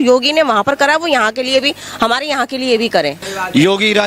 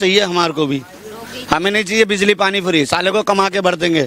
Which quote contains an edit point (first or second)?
first